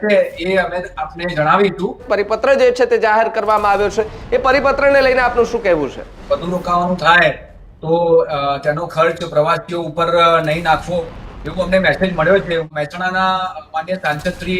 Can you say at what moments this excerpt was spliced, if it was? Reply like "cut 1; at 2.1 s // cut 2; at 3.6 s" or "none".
cut 1; at 2.1 s // cut 2; at 6.1 s // cut 3; at 12.7 s